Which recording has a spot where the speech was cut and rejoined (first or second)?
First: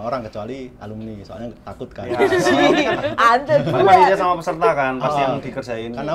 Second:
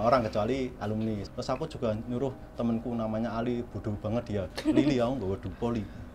second